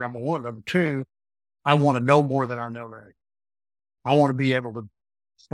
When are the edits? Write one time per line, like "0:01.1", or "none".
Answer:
none

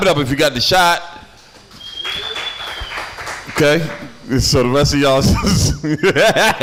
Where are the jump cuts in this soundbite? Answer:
none

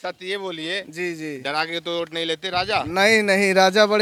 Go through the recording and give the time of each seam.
none

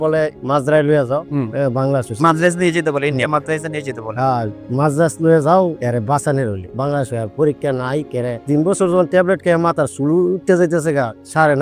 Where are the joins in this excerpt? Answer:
none

